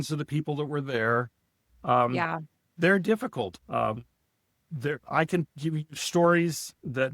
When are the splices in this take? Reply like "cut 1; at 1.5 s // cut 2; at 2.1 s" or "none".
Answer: cut 1; at 3.6 s